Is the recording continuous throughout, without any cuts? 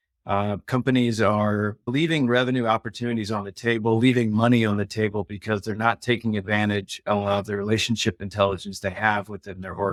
yes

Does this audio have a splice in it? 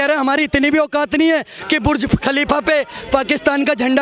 no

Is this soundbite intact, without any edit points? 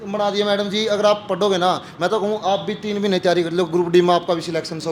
yes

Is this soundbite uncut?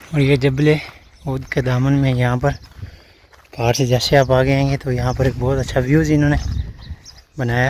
yes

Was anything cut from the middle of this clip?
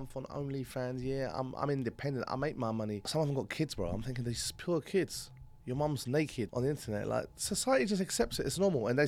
yes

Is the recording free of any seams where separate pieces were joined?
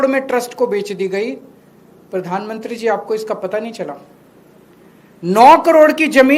yes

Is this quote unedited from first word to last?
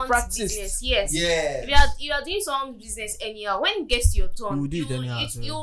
yes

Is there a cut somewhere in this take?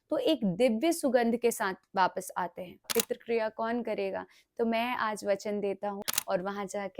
yes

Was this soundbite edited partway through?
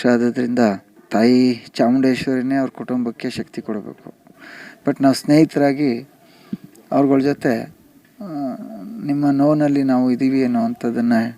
yes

